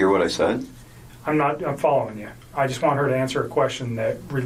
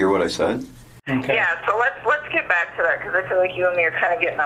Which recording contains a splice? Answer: second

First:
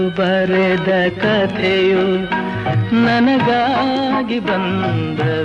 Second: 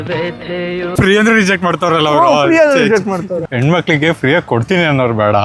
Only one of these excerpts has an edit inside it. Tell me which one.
second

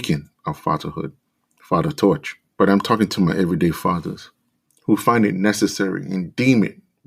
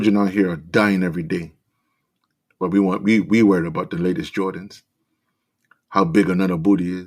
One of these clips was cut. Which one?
first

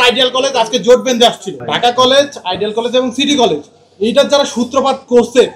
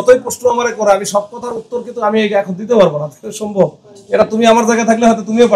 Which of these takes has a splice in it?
first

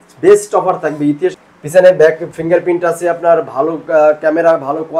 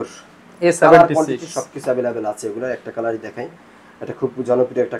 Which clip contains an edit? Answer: first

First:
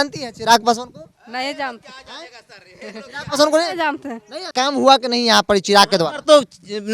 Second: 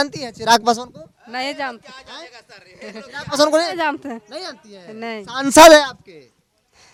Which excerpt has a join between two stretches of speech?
first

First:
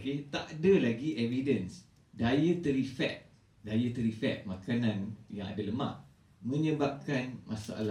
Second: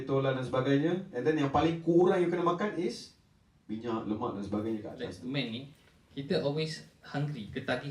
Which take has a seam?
second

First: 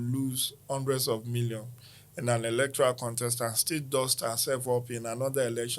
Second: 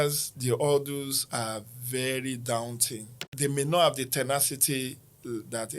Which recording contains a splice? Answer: second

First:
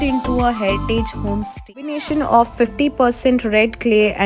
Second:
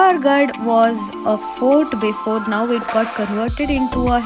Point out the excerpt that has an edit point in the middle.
first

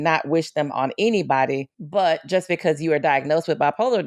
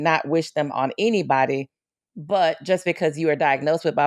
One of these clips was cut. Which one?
first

